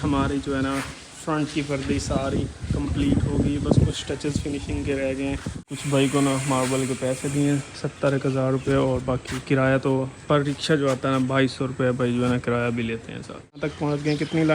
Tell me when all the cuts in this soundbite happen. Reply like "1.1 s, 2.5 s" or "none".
5.7 s, 13.6 s